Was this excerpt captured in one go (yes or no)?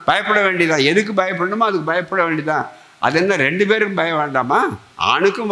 yes